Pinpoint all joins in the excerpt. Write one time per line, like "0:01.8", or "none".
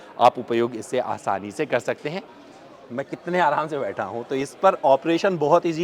0:02.3